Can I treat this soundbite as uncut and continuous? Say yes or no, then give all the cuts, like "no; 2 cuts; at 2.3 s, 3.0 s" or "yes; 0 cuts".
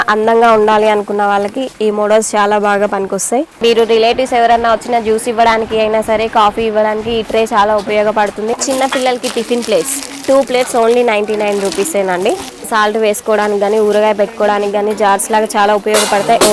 no; 3 cuts; at 3.5 s, 8.6 s, 12.5 s